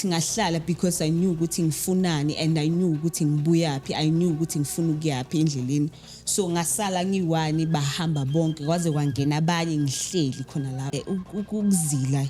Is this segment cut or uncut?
cut